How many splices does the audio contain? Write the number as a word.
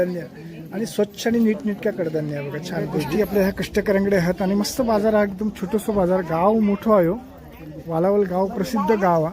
zero